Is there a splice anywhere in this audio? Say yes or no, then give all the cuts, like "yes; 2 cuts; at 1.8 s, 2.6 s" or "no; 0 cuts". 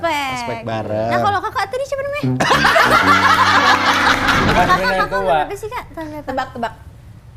yes; 1 cut; at 4.5 s